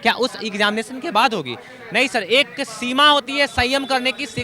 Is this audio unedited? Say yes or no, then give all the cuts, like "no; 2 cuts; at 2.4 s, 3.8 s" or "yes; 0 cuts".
yes; 0 cuts